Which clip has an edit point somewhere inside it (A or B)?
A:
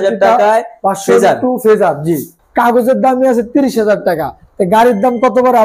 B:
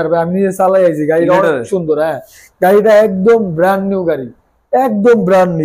A